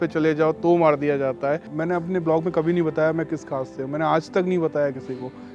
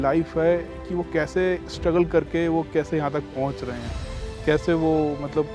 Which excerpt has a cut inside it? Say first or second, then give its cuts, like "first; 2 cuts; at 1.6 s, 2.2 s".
first; 1 cut; at 1.7 s